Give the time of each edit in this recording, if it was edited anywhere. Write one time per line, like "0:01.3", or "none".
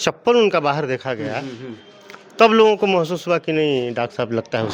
none